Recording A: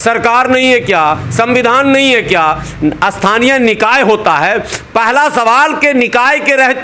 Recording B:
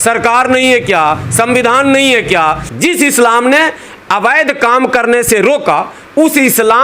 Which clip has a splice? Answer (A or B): B